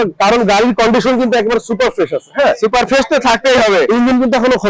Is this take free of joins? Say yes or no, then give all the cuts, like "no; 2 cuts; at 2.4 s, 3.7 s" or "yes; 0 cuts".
yes; 0 cuts